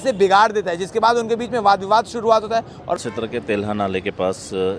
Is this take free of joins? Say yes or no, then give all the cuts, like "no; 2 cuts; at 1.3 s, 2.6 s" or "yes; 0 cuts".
no; 1 cut; at 3.0 s